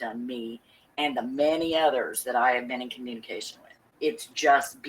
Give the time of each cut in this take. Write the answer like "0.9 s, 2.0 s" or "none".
3.8 s